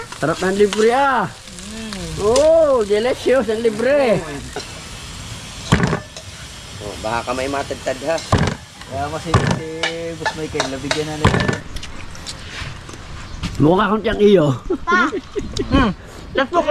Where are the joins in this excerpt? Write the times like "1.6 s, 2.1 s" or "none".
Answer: 4.6 s, 11.7 s